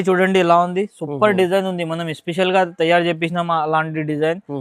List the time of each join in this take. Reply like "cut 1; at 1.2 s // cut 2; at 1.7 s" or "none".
none